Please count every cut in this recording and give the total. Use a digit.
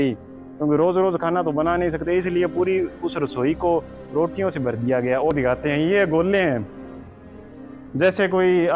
1